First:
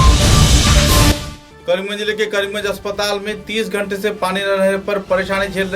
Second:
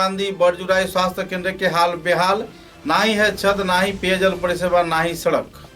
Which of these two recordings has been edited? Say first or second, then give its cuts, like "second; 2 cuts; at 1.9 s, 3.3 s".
first; 1 cut; at 1.0 s